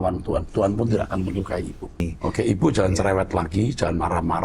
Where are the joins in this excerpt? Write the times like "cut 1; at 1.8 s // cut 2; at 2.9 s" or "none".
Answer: cut 1; at 2.1 s